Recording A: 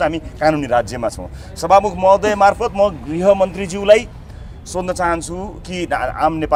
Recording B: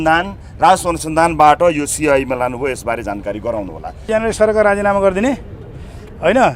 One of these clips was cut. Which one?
B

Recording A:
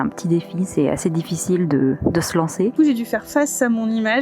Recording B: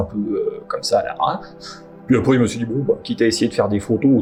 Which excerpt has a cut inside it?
A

